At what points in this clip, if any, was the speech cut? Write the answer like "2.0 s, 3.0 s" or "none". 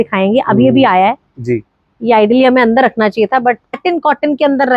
3.8 s